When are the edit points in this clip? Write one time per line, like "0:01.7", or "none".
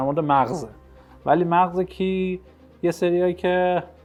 none